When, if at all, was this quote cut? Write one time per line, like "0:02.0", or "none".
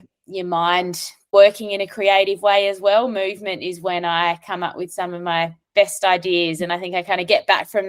none